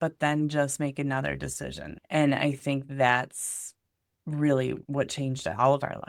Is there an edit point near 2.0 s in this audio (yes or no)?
yes